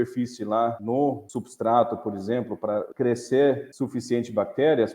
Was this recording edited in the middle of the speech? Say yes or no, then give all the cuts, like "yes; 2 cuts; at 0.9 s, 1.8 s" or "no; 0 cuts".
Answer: yes; 3 cuts; at 0.9 s, 2.9 s, 3.7 s